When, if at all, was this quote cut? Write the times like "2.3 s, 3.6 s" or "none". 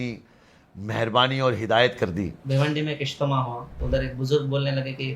2.4 s, 3.7 s